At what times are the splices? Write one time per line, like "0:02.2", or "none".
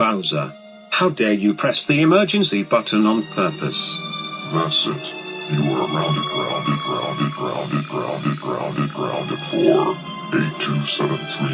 none